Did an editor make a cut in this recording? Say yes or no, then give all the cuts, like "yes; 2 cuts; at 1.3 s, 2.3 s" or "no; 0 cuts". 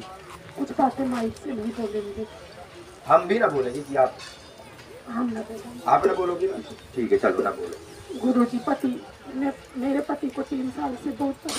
no; 0 cuts